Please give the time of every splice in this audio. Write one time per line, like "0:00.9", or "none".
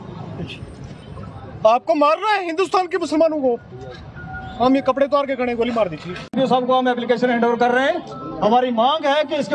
0:06.3